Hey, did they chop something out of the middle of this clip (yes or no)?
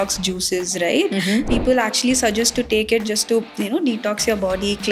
yes